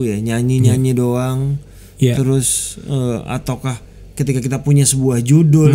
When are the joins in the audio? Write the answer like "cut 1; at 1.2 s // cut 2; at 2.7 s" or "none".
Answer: none